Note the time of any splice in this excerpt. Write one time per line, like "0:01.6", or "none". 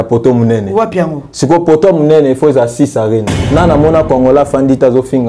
0:03.4